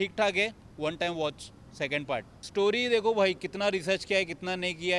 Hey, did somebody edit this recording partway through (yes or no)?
no